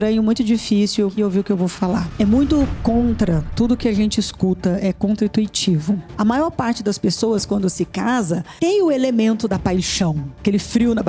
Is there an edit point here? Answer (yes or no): yes